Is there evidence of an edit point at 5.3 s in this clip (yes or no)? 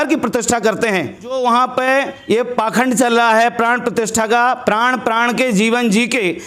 no